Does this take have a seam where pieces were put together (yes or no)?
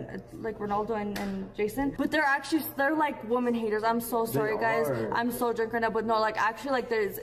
yes